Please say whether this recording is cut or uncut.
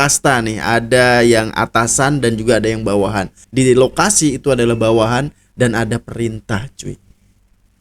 cut